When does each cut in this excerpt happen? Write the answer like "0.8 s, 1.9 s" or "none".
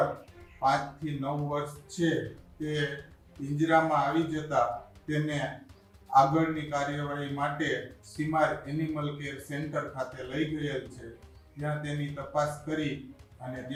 none